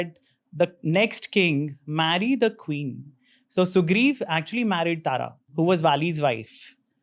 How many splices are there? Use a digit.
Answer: 1